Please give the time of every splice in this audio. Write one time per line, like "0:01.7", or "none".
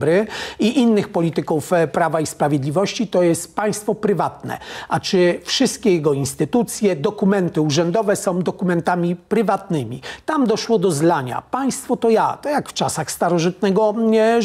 none